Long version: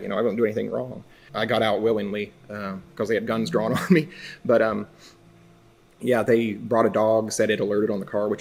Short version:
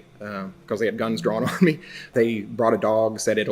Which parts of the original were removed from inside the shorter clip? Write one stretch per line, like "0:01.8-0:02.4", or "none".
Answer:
0:04.4-0:06.2